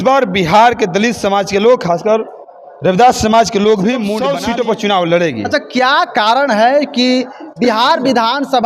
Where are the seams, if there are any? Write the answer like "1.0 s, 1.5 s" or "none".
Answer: 4.2 s